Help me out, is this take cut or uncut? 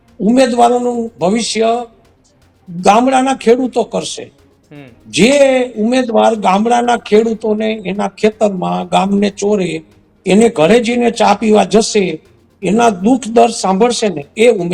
uncut